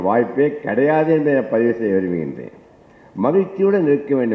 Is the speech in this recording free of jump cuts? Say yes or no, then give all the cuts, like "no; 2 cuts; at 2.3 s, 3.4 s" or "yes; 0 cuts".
yes; 0 cuts